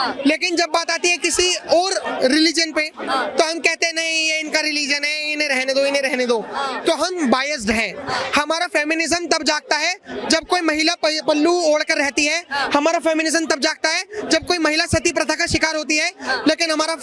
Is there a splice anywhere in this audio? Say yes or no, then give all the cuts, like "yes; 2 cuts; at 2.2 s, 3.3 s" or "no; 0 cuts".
no; 0 cuts